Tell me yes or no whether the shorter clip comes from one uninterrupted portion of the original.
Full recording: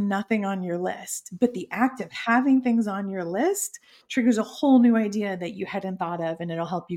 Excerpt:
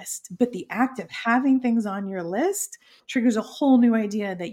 yes